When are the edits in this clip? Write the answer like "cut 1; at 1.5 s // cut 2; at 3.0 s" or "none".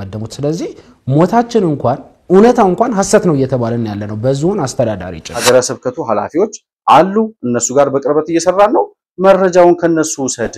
cut 1; at 5.4 s